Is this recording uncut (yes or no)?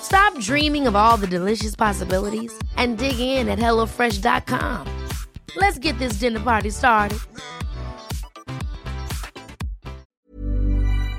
no